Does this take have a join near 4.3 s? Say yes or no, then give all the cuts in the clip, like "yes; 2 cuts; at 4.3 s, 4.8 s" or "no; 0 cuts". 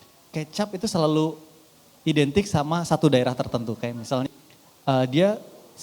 yes; 1 cut; at 4.3 s